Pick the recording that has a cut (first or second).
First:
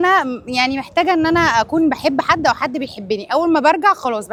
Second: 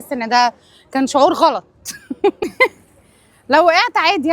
second